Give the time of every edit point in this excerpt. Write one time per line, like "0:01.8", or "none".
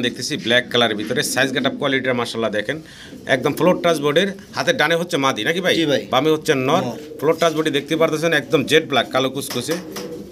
none